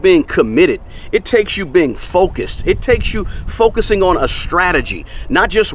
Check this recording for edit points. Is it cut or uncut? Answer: uncut